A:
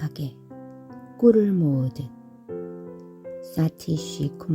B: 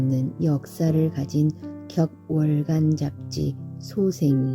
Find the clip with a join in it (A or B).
A